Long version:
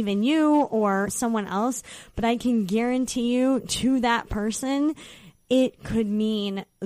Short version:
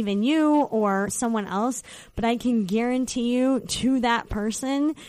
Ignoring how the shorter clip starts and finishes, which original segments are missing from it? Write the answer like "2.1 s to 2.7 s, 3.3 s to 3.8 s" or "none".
none